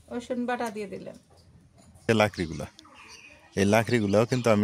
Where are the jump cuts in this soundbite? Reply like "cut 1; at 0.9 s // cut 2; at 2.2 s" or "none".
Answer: cut 1; at 2.1 s

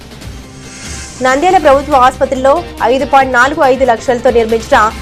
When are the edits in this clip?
none

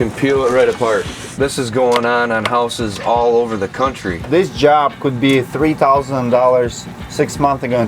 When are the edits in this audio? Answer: cut 1; at 1.2 s // cut 2; at 4.3 s

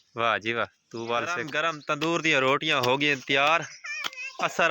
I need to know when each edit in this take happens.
cut 1; at 1.5 s

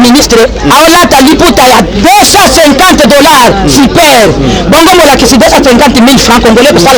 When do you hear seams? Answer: none

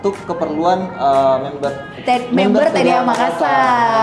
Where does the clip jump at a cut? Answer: cut 1; at 1.9 s

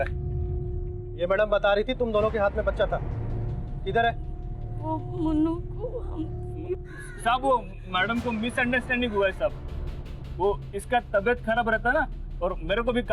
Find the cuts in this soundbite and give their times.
none

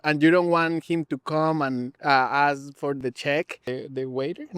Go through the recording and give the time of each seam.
cut 1; at 1.9 s // cut 2; at 3.0 s // cut 3; at 3.6 s

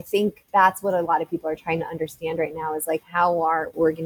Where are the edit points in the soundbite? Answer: none

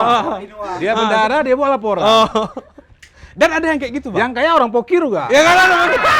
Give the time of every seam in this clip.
none

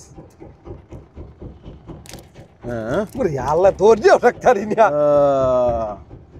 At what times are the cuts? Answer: none

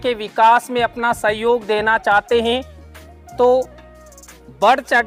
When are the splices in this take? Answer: none

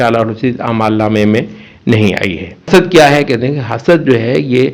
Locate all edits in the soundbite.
cut 1; at 2.7 s

